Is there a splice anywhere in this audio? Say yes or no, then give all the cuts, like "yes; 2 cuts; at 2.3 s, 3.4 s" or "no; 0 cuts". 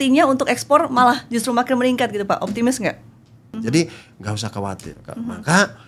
yes; 1 cut; at 3.4 s